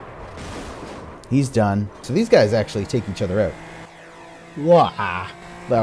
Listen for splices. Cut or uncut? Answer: cut